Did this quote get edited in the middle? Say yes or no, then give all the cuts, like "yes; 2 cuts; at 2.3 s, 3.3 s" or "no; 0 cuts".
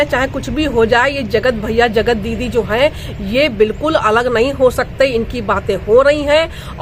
no; 0 cuts